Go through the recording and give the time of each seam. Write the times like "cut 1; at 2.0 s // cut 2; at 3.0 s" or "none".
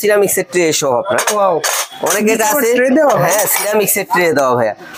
none